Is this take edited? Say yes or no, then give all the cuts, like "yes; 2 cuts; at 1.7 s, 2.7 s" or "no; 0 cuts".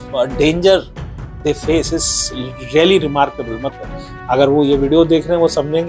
yes; 1 cut; at 3.7 s